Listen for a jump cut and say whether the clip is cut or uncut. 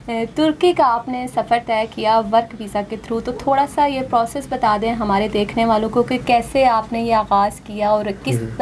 uncut